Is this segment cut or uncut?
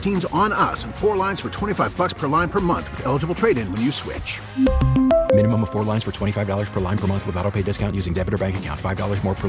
uncut